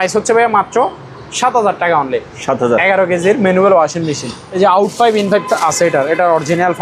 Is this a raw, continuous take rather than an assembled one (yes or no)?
no